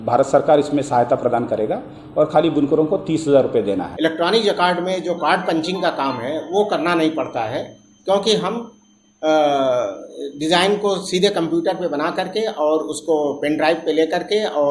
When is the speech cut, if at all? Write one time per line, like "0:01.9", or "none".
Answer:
0:03.9